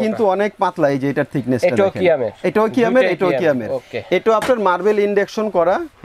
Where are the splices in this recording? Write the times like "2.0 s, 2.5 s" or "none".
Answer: none